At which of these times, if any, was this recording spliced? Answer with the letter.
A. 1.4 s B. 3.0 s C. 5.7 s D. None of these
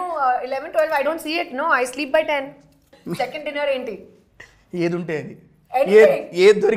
B